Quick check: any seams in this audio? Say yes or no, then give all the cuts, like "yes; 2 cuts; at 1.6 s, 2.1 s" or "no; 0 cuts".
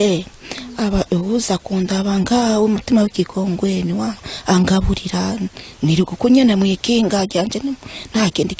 no; 0 cuts